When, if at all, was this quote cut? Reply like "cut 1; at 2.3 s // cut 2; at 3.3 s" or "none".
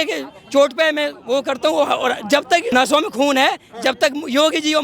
cut 1; at 2.7 s

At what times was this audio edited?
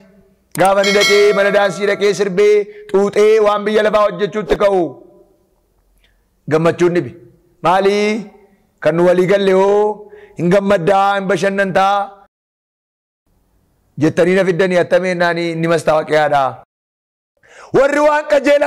cut 1; at 16.7 s

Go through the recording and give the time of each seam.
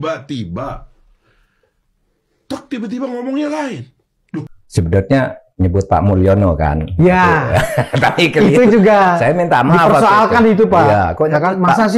cut 1; at 4.2 s

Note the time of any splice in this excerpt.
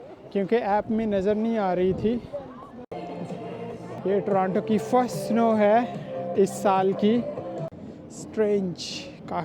cut 1; at 2.9 s // cut 2; at 4.0 s // cut 3; at 7.7 s

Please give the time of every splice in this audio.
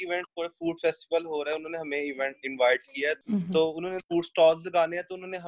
cut 1; at 3.2 s // cut 2; at 4.0 s

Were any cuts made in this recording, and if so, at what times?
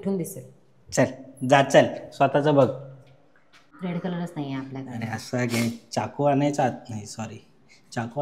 cut 1; at 3.7 s

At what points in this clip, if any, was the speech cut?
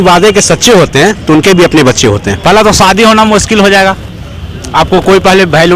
cut 1; at 2.3 s

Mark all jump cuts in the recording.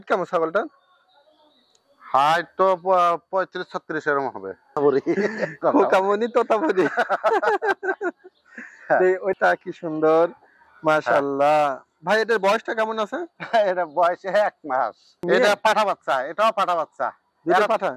cut 1; at 4.8 s // cut 2; at 9.4 s // cut 3; at 15.1 s

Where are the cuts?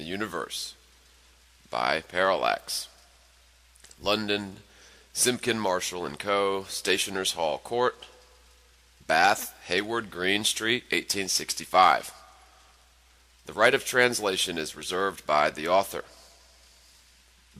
none

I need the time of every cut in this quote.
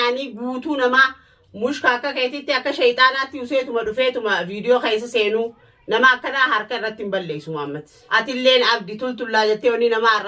cut 1; at 7.9 s

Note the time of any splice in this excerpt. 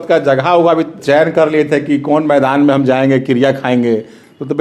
cut 1; at 1.0 s

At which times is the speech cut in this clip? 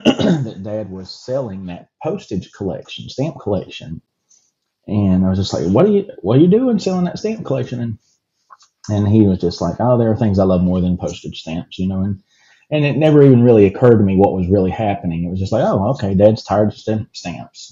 none

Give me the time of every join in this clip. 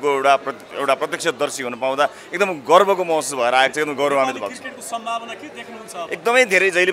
none

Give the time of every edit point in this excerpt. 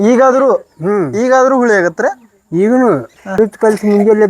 cut 1; at 3.4 s

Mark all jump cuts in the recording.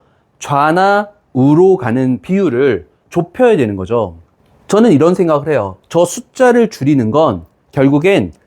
cut 1; at 2.9 s

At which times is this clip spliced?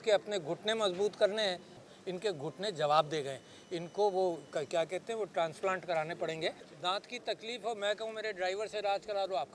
cut 1; at 1.7 s // cut 2; at 6.7 s

